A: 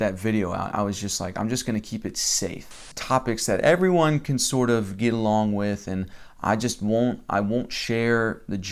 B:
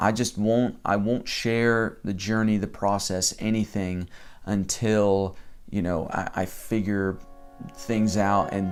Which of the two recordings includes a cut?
A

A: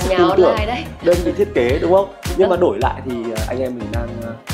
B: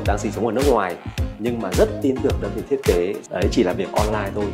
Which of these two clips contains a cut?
B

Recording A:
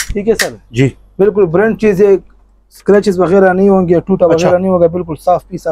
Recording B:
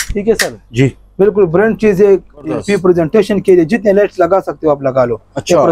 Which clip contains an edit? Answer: B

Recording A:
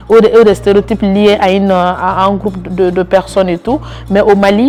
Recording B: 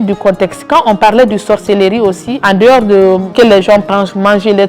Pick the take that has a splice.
B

